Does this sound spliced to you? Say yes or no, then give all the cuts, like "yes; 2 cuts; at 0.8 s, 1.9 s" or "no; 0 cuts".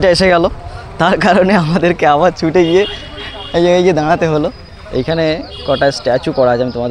no; 0 cuts